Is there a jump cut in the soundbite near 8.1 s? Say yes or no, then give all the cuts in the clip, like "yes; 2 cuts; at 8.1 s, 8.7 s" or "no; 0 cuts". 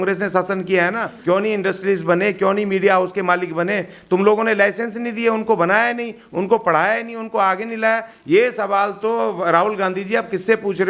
no; 1 cut; at 1.1 s